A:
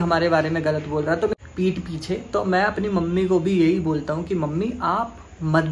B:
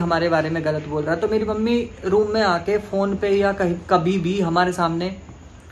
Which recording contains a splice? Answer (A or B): A